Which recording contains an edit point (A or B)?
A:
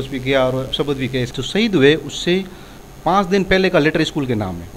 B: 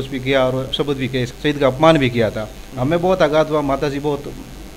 A